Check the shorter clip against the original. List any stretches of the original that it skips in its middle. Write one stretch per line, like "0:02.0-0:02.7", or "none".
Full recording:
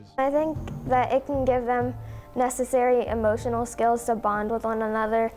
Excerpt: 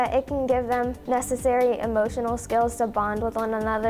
0:02.0-0:02.3